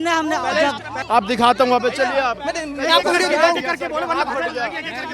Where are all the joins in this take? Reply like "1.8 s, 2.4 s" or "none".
0.9 s